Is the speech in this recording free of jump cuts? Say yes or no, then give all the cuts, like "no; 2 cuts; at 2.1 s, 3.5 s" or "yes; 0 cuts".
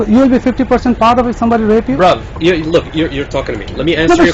yes; 0 cuts